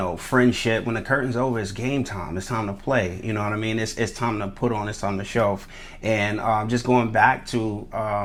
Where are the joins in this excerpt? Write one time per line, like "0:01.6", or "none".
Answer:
none